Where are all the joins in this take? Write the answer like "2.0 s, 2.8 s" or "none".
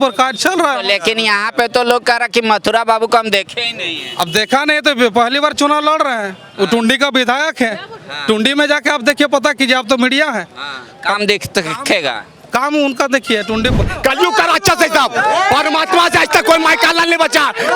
13.8 s